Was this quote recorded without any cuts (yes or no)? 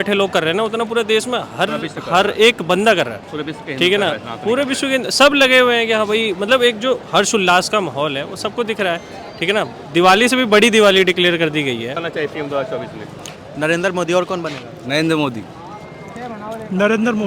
no